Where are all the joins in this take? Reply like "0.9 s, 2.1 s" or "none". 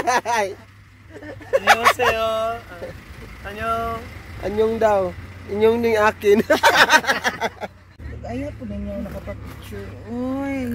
8.1 s

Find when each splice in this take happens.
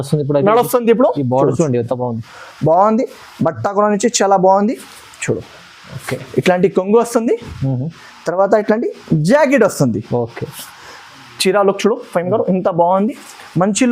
none

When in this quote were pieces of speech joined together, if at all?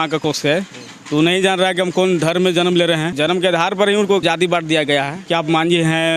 3.1 s, 4.2 s, 5.2 s

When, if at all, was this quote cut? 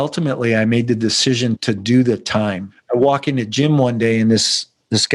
2.9 s

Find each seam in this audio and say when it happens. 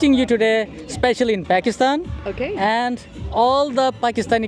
none

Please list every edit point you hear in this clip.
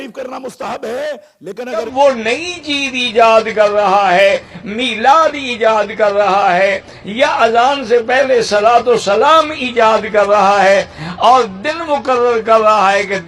1.9 s

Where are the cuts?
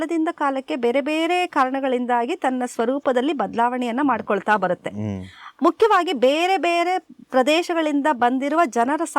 none

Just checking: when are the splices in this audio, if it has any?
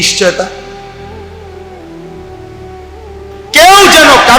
1.0 s, 2.8 s

